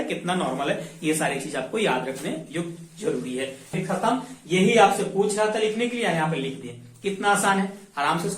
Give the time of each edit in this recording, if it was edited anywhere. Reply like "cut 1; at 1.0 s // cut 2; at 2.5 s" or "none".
cut 1; at 3.7 s